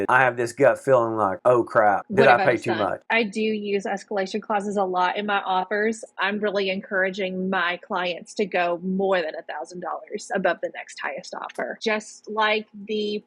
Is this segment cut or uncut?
cut